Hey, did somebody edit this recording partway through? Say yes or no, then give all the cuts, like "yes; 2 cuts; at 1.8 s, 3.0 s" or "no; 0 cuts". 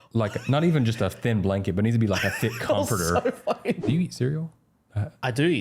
yes; 1 cut; at 3.8 s